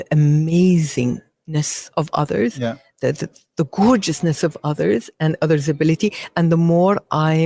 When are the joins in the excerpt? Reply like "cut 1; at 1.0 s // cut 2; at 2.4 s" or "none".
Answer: none